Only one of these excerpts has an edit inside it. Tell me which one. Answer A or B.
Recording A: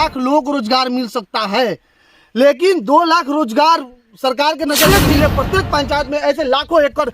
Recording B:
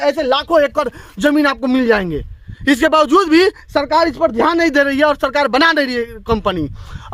A